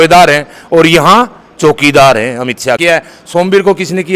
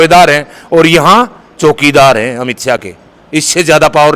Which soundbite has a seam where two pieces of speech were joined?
first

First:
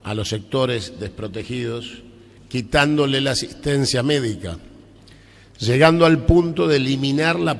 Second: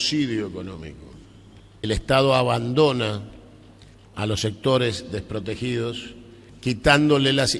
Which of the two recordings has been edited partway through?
second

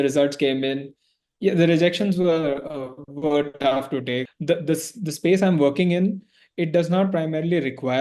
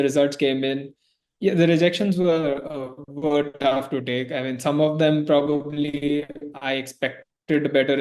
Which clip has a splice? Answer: first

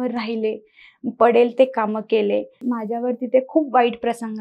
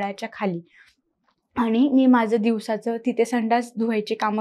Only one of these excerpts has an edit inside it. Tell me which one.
first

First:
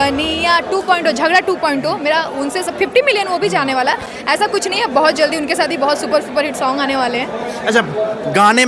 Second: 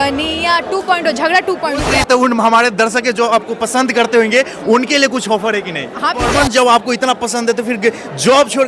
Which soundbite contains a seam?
second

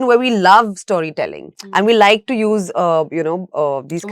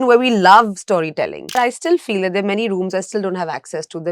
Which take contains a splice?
second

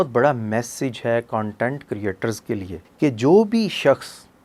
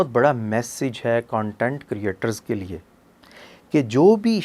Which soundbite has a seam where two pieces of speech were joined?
first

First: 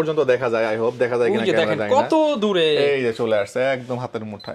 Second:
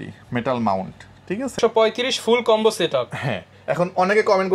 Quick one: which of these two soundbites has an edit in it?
second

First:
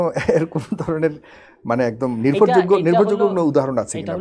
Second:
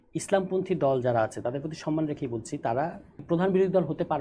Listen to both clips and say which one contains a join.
second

